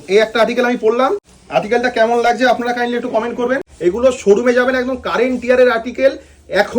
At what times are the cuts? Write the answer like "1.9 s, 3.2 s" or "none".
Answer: 1.3 s, 3.7 s